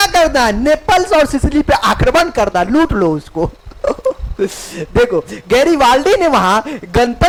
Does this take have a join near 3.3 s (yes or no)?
no